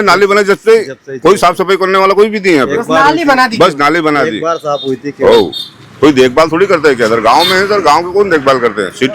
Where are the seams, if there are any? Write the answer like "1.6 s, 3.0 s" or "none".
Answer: none